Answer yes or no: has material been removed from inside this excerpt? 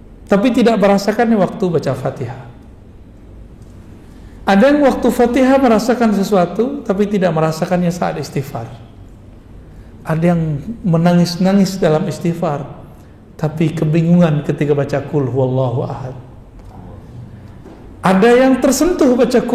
no